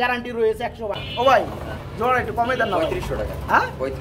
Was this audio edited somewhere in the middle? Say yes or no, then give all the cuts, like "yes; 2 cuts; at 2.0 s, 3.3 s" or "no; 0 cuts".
yes; 1 cut; at 1.1 s